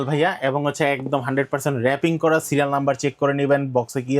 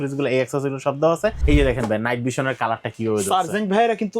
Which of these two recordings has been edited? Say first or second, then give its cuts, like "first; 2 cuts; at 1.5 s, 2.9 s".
second; 1 cut; at 1.4 s